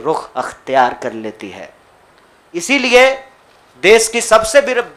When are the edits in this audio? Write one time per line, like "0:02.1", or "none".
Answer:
none